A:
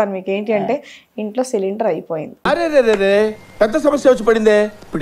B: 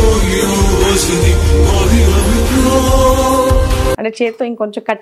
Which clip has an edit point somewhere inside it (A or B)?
B